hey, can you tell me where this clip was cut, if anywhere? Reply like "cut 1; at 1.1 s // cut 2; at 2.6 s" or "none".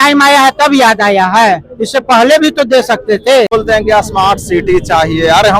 cut 1; at 3.5 s

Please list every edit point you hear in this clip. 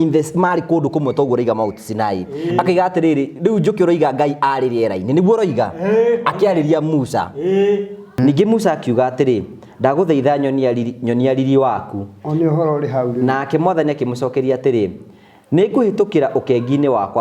cut 1; at 8.0 s

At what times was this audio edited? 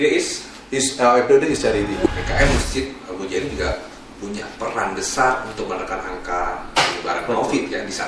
cut 1; at 2.0 s

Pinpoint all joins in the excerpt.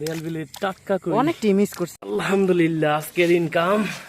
cut 1; at 1.9 s

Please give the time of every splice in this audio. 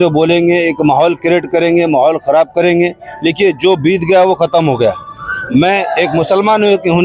cut 1; at 5.3 s

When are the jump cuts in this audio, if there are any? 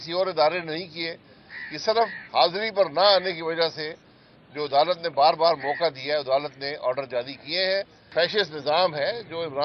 cut 1; at 8.1 s

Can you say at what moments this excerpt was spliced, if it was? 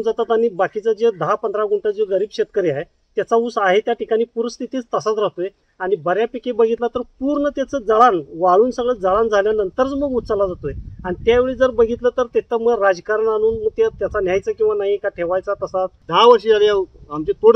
cut 1; at 16.0 s

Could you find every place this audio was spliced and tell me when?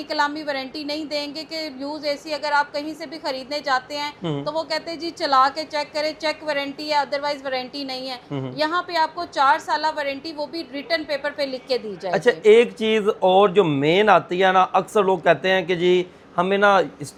none

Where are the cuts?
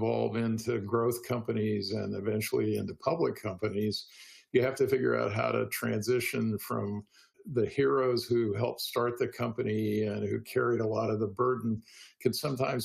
cut 1; at 7.4 s

